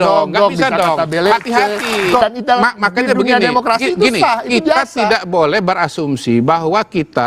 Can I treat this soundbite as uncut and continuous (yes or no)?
no